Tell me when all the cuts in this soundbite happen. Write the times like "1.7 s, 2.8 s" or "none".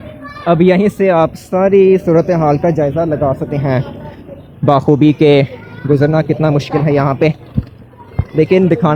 none